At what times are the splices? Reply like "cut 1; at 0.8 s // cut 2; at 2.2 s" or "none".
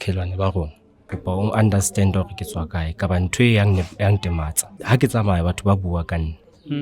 cut 1; at 1.1 s // cut 2; at 4.7 s